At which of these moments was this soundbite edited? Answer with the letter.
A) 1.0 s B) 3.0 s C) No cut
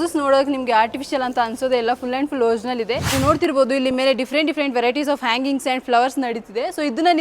B